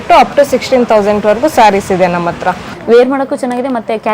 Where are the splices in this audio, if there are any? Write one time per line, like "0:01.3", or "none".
0:02.6